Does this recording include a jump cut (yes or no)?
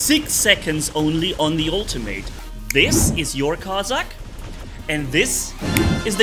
yes